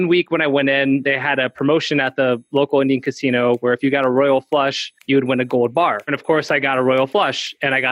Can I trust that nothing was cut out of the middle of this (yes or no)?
no